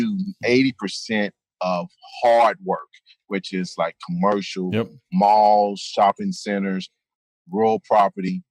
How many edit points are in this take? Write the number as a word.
zero